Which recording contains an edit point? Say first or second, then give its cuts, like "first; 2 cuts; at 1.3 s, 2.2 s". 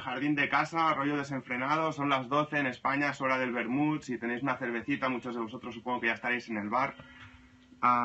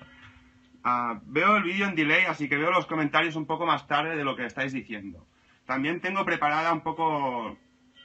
first; 1 cut; at 2.5 s